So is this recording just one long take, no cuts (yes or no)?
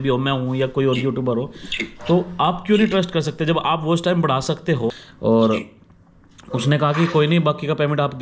no